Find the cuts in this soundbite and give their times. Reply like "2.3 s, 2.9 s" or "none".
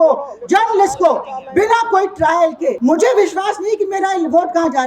2.8 s